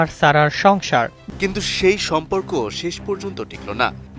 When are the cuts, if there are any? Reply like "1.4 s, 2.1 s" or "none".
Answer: 1.2 s